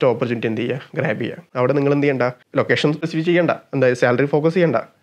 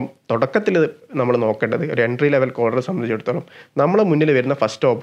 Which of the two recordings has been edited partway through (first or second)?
first